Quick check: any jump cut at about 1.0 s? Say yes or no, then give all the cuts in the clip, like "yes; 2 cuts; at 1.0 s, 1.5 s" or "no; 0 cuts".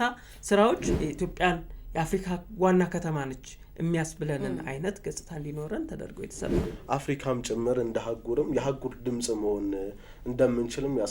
yes; 2 cuts; at 1.0 s, 6.6 s